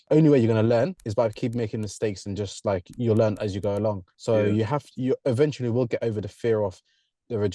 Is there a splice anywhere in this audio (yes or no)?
yes